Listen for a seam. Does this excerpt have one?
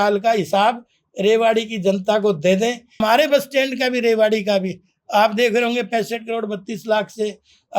yes; 1 cut; at 3.0 s

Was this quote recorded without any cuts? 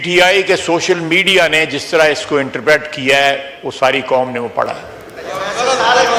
yes; 0 cuts

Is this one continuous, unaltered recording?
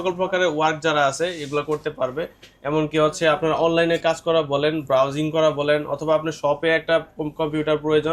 yes; 0 cuts

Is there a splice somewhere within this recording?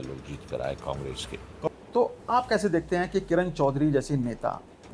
yes; 1 cut; at 1.7 s

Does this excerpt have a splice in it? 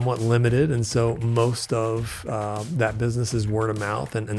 no; 0 cuts

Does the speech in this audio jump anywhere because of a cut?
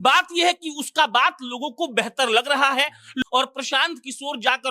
yes; 1 cut; at 3.2 s

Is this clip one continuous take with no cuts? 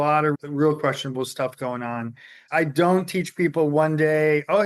no; 1 cut; at 2.4 s

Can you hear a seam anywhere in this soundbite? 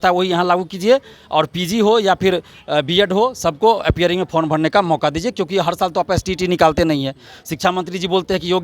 no; 0 cuts

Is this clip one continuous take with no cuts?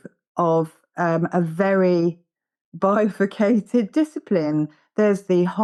yes; 0 cuts

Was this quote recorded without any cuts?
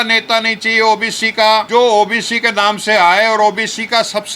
no; 1 cut; at 1.7 s

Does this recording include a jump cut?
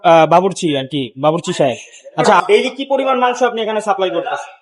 yes; 1 cut; at 2.4 s

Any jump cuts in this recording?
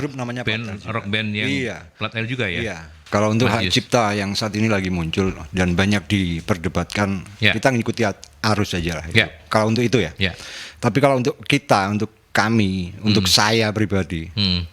yes; 1 cut; at 2.9 s

